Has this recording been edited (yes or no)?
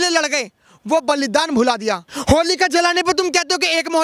yes